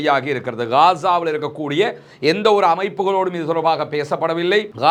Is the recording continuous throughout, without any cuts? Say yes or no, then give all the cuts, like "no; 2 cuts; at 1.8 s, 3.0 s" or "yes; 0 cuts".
yes; 0 cuts